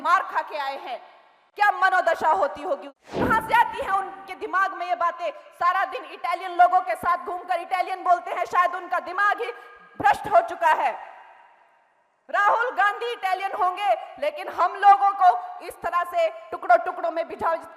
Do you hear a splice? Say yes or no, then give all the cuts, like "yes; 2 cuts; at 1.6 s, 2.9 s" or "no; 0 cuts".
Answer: yes; 1 cut; at 3.0 s